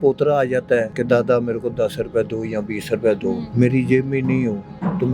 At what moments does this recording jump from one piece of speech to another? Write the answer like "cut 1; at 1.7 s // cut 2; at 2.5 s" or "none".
cut 1; at 0.9 s // cut 2; at 3.5 s